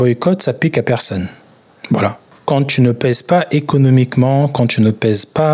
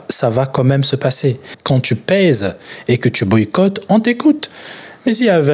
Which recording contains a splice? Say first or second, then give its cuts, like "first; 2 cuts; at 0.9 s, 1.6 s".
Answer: second; 1 cut; at 1.5 s